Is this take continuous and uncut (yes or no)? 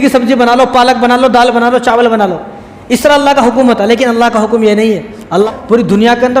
no